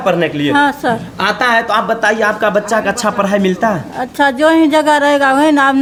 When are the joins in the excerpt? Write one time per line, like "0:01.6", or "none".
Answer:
none